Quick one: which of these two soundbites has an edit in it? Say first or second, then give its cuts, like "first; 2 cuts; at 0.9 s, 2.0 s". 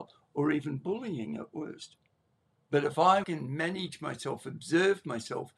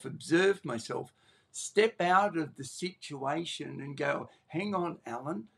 first; 1 cut; at 3.2 s